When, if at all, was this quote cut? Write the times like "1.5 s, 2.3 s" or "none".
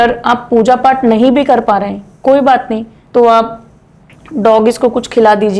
2.9 s

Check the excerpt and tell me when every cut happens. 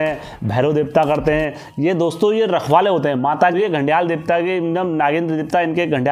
3.6 s

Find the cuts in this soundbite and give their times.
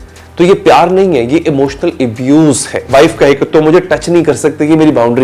2.9 s

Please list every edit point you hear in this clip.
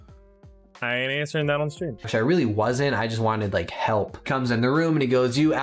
2.0 s

